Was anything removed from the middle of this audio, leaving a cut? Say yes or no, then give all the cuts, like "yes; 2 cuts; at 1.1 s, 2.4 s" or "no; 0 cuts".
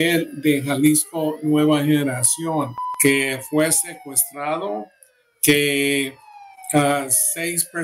yes; 1 cut; at 2.8 s